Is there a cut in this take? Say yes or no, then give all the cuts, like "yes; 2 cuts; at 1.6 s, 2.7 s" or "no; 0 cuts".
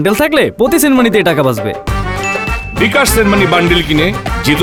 no; 0 cuts